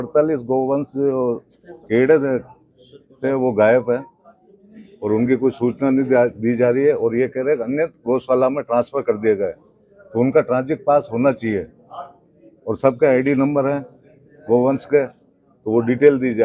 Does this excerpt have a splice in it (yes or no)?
no